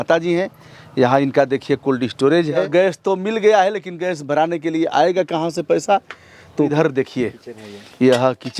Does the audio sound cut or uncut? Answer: cut